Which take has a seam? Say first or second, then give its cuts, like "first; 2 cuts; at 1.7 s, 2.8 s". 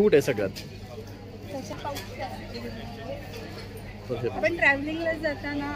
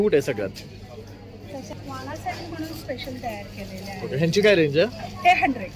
second; 1 cut; at 1.8 s